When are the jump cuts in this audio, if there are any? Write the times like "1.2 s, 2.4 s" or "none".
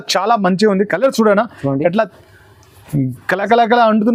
none